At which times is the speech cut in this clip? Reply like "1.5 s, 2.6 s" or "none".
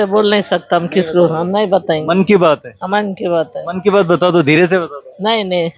none